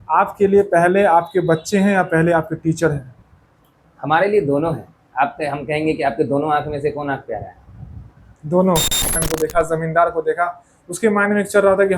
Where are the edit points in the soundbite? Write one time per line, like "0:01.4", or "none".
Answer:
0:09.1

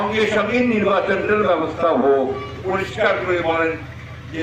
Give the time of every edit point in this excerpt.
0:02.5

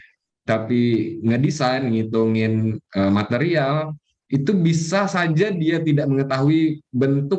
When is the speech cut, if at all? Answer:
none

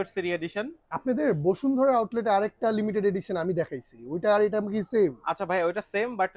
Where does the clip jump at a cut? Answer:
none

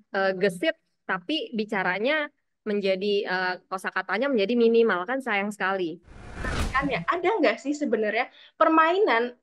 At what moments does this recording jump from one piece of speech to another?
0:06.5

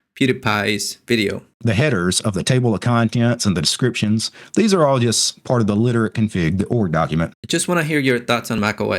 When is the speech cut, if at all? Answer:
0:01.5
0:07.4

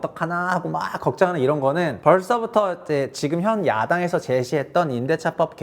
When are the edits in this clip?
0:01.9

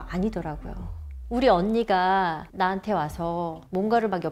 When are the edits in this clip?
none

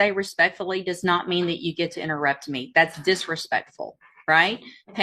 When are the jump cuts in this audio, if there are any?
none

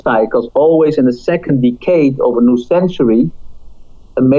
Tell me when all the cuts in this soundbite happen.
none

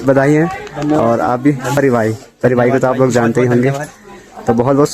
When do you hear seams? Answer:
0:01.8

